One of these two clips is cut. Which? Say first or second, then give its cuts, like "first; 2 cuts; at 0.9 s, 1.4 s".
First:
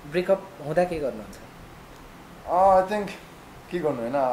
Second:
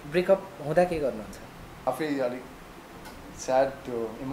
second; 1 cut; at 1.9 s